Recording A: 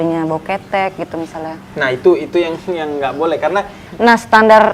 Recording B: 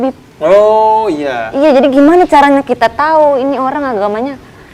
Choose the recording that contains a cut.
A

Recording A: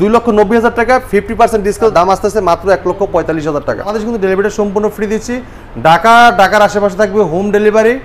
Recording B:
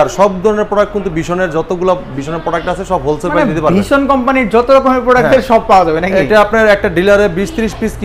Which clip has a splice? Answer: A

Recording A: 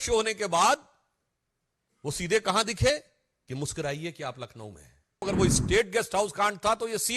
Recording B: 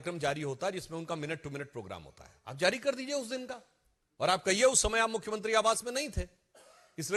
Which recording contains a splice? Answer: A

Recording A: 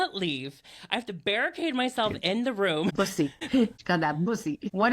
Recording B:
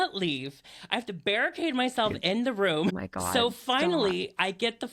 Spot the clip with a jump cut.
A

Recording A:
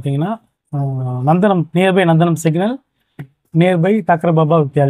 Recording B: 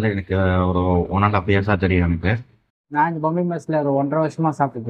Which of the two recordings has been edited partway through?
B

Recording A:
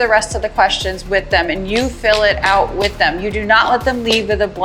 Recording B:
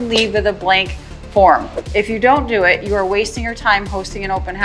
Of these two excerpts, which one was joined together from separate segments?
B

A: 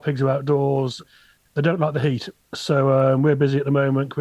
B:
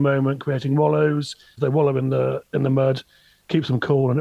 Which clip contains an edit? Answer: B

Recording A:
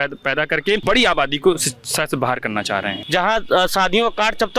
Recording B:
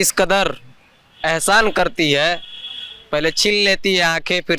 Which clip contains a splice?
A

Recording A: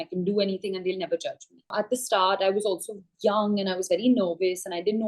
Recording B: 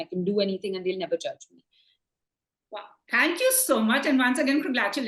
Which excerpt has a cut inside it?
A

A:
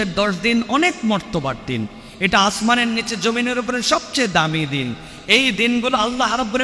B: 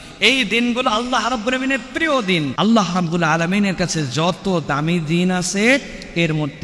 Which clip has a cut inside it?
B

